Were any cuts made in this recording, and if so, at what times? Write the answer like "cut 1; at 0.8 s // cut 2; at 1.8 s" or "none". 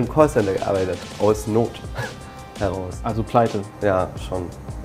none